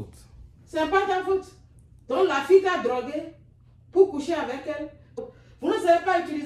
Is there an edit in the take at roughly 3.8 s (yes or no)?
no